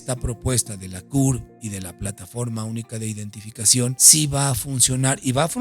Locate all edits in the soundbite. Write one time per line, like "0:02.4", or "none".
0:04.0